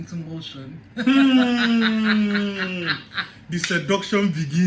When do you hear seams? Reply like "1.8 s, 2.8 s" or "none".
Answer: none